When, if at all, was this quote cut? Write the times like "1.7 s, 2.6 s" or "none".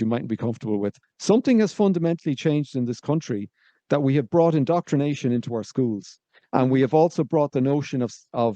1.0 s

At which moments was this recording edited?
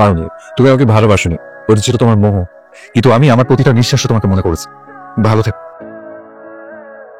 5.5 s

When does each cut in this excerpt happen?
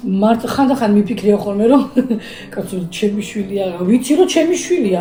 none

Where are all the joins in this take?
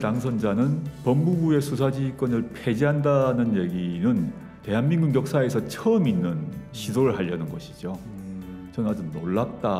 none

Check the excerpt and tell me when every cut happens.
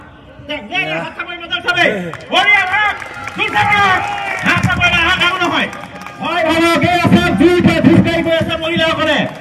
5.3 s

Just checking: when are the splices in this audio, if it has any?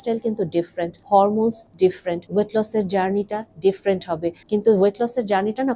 1.0 s, 1.9 s, 4.4 s

